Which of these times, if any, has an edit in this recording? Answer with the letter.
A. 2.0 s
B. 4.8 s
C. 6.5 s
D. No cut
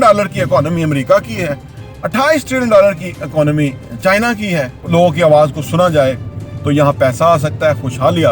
B